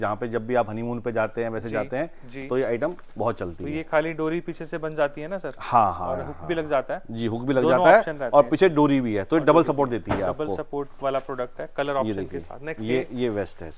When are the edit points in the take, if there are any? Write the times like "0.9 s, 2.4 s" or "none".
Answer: none

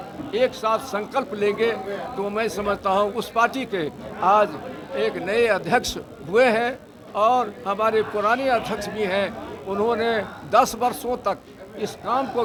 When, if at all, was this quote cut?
none

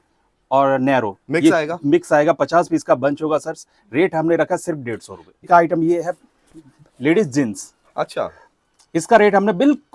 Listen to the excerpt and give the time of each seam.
5.5 s

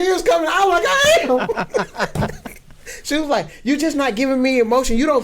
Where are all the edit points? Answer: none

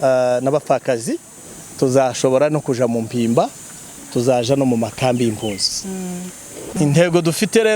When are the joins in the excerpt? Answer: 6.7 s

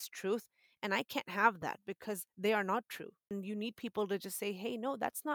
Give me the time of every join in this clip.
3.3 s

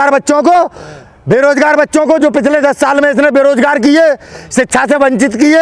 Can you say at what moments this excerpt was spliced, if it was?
none

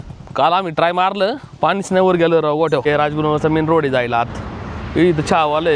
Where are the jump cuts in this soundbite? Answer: 2.9 s

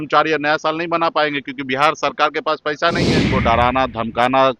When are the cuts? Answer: 3.3 s

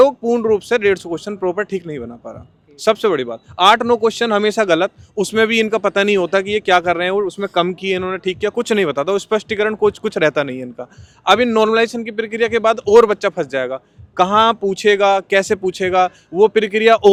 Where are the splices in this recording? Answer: none

